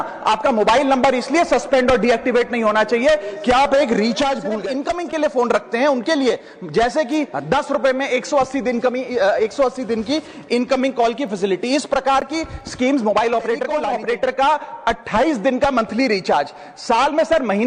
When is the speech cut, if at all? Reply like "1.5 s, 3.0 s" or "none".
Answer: 4.7 s, 13.8 s